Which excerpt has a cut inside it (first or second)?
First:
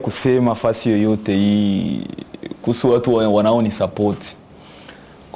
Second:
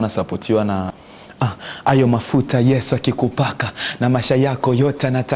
second